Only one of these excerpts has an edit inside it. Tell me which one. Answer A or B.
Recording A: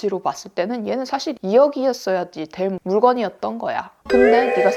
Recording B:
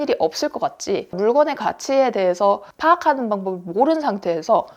B